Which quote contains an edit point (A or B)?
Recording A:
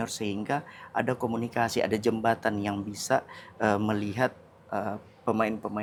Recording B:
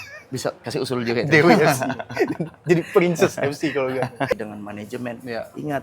B